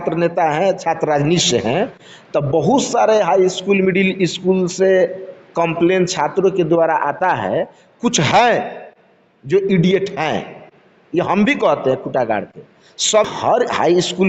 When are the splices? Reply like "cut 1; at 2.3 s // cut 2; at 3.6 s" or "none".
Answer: cut 1; at 13.2 s